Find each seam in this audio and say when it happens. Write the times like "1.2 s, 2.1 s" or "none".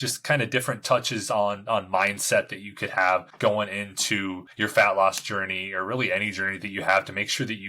3.3 s, 4.4 s